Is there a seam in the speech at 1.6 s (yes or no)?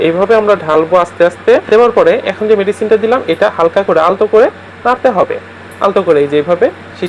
yes